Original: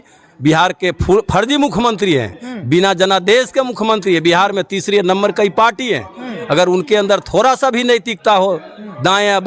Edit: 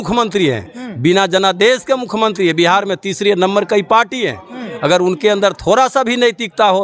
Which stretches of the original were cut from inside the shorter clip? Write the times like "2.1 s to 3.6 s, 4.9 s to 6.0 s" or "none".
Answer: none